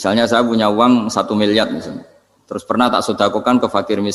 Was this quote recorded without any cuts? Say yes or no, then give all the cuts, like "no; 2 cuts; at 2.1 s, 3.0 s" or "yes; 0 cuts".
yes; 0 cuts